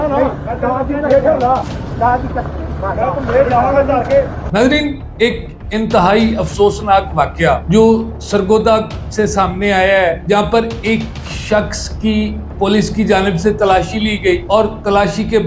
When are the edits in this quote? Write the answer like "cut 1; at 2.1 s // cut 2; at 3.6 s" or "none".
cut 1; at 4.4 s